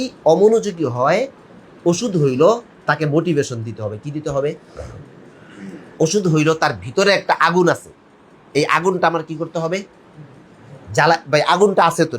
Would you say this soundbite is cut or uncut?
uncut